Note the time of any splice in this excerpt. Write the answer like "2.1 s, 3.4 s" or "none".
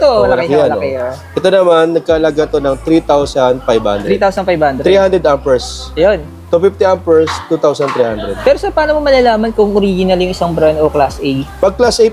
8.3 s